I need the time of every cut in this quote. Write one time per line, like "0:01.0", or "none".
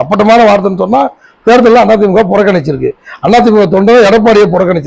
none